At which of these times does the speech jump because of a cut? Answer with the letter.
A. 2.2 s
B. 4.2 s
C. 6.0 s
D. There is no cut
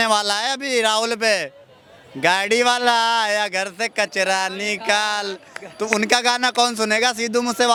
D